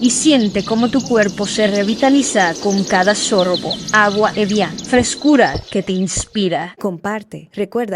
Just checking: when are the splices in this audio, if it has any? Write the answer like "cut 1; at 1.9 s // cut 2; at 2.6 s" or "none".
cut 1; at 6.7 s